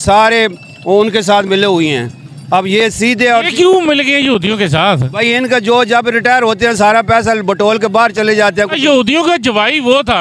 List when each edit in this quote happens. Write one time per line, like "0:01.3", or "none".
none